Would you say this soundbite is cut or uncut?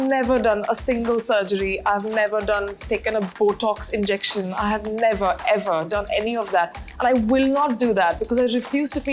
uncut